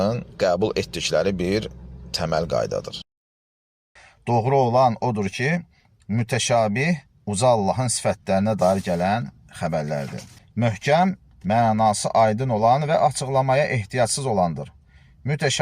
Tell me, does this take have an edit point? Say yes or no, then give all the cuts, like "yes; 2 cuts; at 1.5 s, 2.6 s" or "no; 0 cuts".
yes; 2 cuts; at 3.3 s, 10.4 s